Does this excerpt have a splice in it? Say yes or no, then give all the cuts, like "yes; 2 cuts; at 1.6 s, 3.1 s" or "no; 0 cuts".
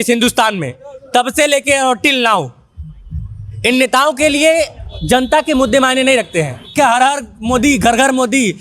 yes; 1 cut; at 6.7 s